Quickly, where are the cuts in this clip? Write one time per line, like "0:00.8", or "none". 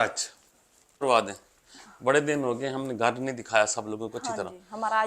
0:01.0